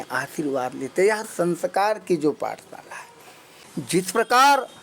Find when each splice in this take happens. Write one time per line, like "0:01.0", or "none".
0:03.6